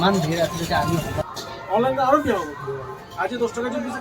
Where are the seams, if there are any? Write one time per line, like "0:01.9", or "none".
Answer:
0:01.2